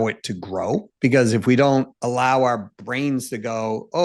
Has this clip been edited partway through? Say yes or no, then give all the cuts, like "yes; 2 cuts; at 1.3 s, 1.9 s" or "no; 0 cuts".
yes; 2 cuts; at 0.9 s, 1.9 s